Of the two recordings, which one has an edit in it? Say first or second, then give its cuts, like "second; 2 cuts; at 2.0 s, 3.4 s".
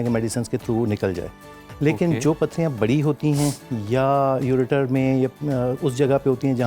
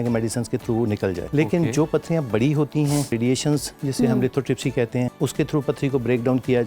second; 3 cuts; at 1.2 s, 3.1 s, 5.1 s